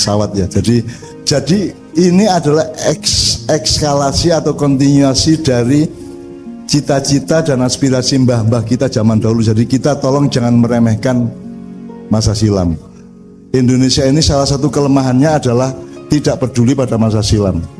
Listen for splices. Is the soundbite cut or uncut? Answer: uncut